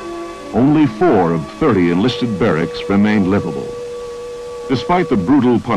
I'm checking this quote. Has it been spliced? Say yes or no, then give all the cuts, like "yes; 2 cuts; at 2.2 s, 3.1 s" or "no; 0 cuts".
yes; 1 cut; at 2.8 s